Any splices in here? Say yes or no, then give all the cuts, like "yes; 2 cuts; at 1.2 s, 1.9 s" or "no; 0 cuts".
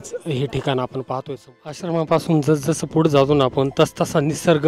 yes; 1 cut; at 1.8 s